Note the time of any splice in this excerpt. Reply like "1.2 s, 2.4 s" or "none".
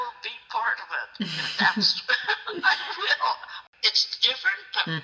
3.5 s